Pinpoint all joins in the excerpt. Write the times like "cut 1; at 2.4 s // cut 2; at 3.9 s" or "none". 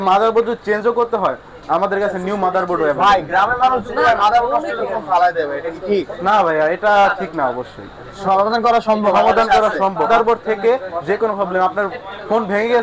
cut 1; at 10.1 s